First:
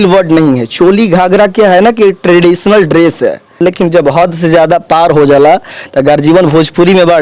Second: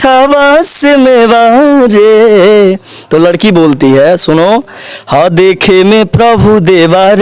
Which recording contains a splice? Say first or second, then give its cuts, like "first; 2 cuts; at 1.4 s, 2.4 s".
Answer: first; 1 cut; at 3.6 s